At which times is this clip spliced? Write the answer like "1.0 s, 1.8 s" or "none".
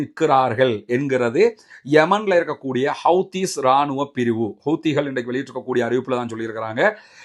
none